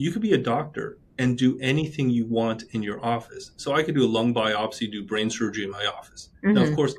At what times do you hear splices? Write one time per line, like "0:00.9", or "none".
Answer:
none